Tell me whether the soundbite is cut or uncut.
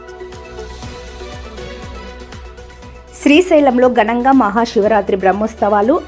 cut